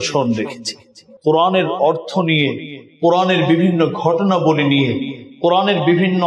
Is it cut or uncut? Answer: cut